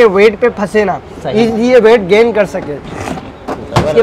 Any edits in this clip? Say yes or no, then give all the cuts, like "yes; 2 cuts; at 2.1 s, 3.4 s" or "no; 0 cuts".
no; 0 cuts